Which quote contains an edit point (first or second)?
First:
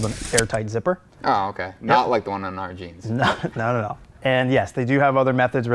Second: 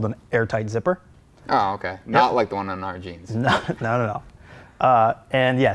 first